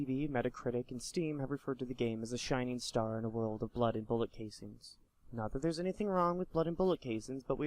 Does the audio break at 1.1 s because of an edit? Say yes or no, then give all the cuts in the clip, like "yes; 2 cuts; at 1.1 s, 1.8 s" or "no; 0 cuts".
no; 1 cut; at 6.7 s